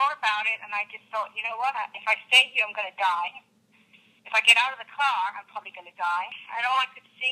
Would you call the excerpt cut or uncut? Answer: cut